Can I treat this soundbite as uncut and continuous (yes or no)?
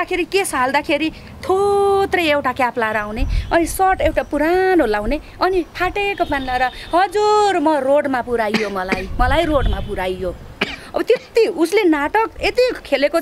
yes